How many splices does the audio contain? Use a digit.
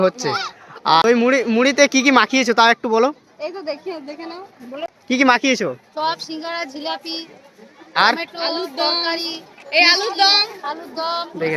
2